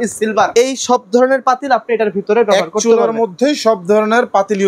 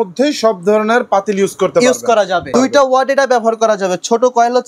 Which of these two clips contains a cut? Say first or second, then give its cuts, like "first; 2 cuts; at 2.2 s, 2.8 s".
second; 1 cut; at 2.5 s